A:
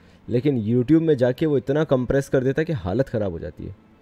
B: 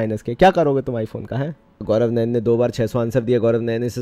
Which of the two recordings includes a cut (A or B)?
B